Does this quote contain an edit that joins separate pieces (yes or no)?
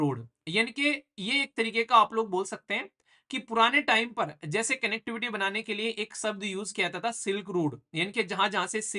no